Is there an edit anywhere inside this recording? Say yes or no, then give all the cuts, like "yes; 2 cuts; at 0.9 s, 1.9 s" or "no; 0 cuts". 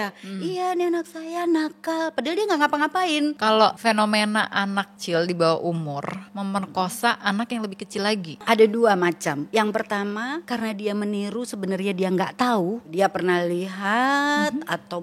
yes; 7 cuts; at 3.6 s, 5.0 s, 6.2 s, 8.4 s, 9.4 s, 10.4 s, 12.9 s